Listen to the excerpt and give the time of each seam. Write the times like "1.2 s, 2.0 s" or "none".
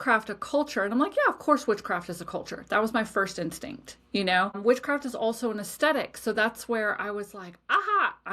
4.6 s